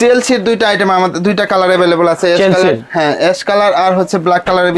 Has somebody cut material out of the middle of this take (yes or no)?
no